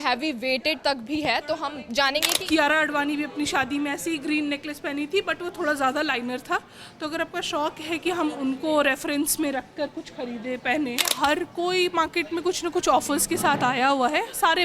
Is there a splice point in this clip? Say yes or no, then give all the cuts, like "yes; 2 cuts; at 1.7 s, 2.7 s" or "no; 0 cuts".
yes; 2 cuts; at 2.3 s, 11.1 s